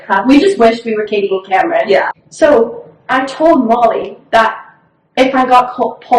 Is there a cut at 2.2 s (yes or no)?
yes